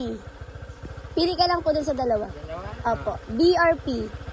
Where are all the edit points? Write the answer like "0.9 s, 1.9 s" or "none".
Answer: none